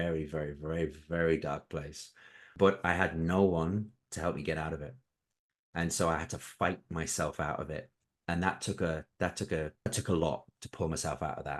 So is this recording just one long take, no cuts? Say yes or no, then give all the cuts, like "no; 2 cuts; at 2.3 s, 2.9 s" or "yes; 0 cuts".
no; 3 cuts; at 2.4 s, 8.0 s, 9.9 s